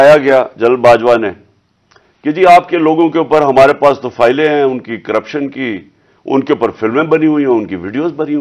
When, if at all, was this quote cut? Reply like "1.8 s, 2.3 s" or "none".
none